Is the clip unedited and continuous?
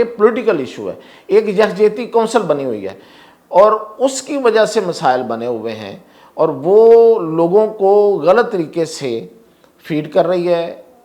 yes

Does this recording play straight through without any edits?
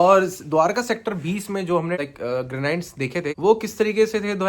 no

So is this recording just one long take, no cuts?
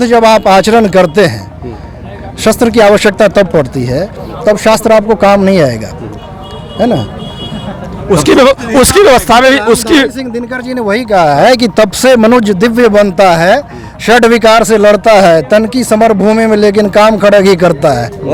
yes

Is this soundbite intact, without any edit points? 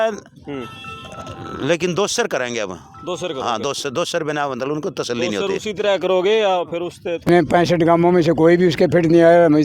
no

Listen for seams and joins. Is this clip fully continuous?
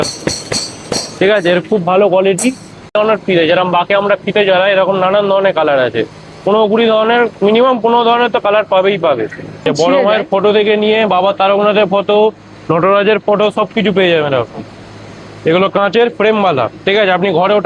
no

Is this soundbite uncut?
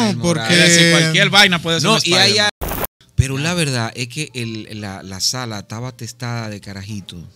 no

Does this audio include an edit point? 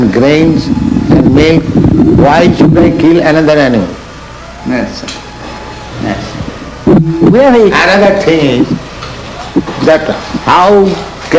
no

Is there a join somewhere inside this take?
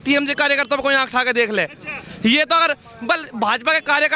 no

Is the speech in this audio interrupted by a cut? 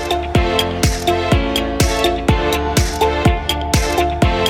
no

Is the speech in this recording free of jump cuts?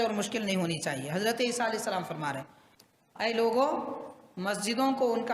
no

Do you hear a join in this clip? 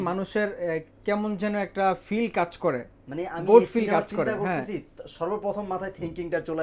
no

